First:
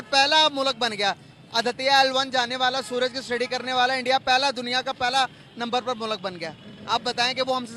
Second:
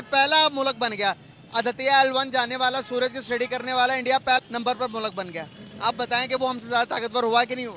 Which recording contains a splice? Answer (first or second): second